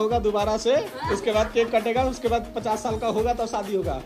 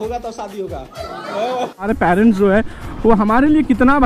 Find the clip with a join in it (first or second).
second